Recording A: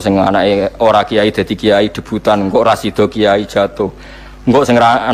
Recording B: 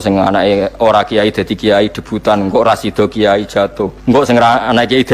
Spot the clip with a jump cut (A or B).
B